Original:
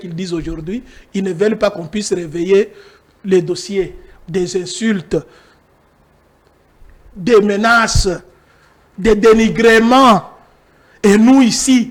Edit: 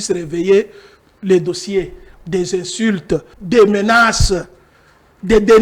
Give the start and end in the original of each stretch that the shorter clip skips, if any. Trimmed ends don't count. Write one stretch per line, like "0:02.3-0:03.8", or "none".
0:05.4-0:07.1